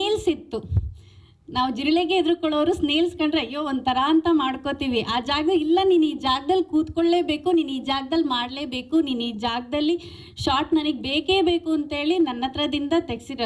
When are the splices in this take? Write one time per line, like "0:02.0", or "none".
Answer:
none